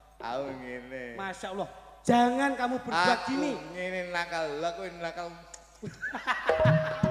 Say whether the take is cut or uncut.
uncut